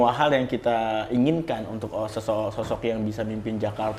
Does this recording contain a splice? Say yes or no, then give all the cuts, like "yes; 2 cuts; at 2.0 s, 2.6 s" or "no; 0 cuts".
no; 0 cuts